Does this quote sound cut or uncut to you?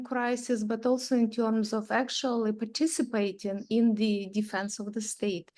uncut